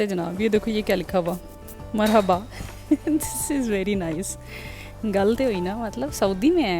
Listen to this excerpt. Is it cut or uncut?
uncut